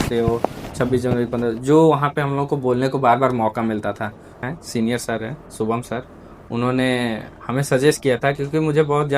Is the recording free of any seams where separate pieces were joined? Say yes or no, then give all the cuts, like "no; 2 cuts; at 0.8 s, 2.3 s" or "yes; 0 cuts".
no; 1 cut; at 4.5 s